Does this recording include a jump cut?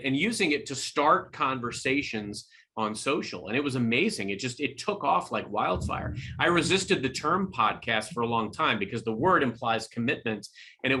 no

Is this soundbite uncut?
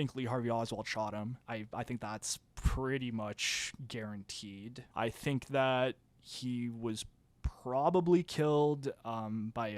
no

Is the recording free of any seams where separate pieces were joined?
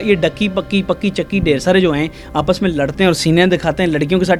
yes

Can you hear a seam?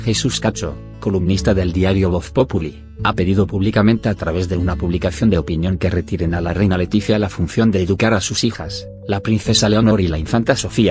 yes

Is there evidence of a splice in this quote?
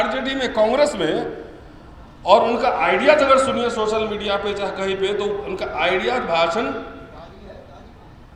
no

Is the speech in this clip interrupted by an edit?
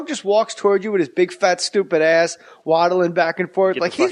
yes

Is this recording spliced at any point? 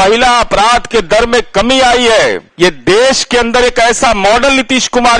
yes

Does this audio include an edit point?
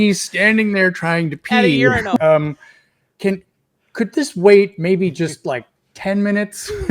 yes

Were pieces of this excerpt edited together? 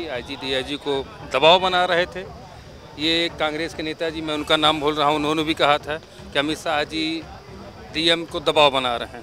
no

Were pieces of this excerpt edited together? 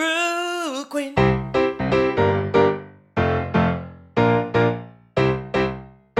yes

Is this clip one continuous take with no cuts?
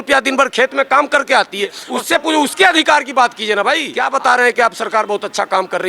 no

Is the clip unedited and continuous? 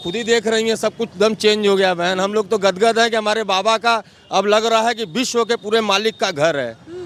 yes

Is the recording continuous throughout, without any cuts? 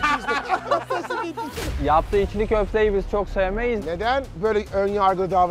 no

